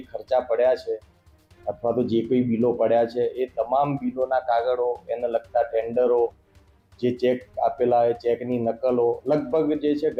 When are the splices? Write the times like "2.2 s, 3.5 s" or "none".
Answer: none